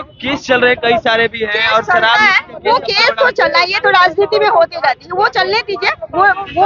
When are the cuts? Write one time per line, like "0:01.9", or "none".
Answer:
none